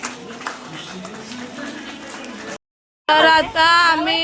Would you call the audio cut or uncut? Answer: cut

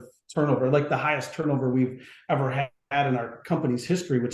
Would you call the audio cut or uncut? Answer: uncut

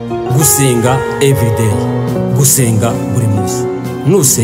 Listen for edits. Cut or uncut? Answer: uncut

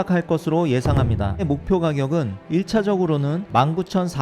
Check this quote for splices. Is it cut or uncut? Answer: cut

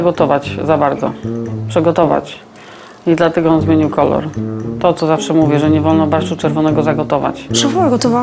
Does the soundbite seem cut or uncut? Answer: uncut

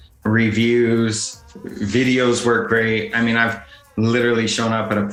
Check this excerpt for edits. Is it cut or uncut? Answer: uncut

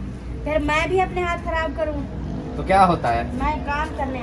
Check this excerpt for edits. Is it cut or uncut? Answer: uncut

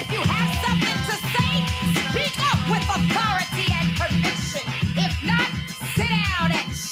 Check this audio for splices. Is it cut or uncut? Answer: uncut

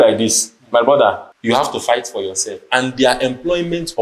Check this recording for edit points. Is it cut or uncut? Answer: cut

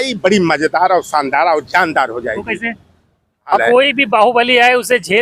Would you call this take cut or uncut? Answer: cut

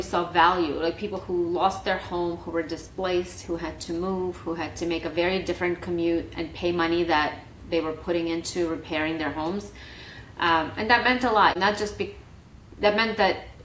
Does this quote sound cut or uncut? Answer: cut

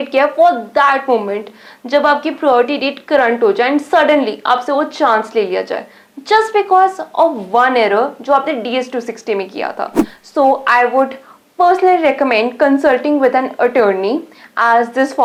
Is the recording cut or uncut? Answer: uncut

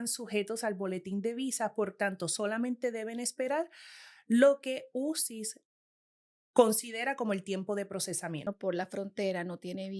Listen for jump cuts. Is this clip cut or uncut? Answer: cut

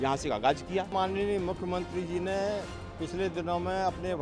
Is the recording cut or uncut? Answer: cut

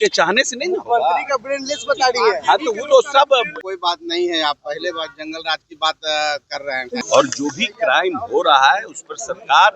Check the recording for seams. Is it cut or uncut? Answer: cut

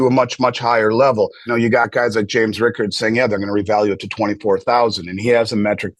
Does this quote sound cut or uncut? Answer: cut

